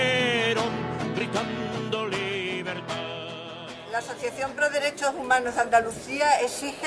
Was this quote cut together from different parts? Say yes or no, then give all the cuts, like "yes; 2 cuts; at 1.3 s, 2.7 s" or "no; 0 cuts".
yes; 1 cut; at 5.2 s